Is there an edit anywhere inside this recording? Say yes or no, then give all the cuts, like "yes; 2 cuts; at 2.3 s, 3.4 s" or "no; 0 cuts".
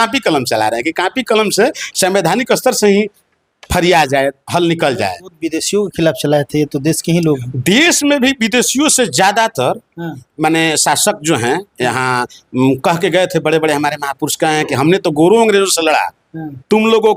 no; 0 cuts